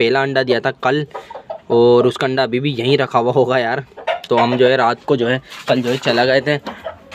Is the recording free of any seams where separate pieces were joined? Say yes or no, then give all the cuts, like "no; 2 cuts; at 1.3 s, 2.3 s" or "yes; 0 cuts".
yes; 0 cuts